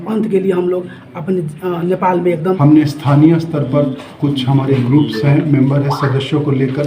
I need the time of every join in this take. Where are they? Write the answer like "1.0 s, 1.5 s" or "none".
2.6 s